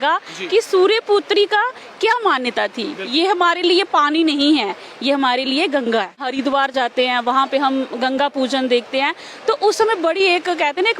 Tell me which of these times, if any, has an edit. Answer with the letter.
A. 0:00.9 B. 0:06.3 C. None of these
B